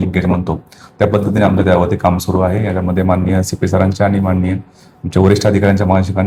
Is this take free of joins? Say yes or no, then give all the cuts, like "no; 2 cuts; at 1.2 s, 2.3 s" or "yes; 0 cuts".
yes; 0 cuts